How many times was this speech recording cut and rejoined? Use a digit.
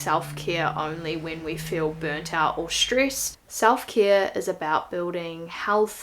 1